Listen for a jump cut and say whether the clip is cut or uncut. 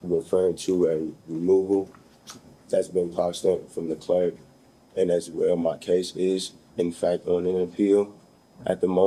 uncut